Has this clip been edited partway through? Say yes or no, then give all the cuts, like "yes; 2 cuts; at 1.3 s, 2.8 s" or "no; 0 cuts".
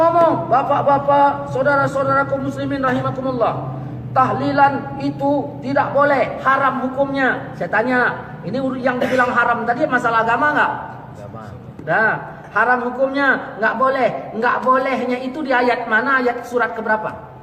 no; 0 cuts